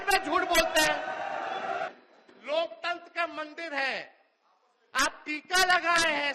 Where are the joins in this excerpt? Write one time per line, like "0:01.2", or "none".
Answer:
0:01.9